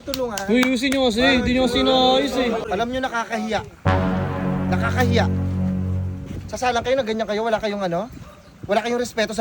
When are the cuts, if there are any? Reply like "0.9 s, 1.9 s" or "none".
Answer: 2.6 s